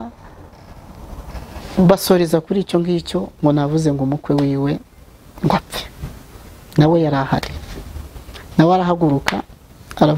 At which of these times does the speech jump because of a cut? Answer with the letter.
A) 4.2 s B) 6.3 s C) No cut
C